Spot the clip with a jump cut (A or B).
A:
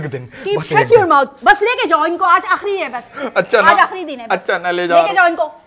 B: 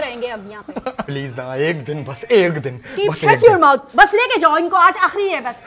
B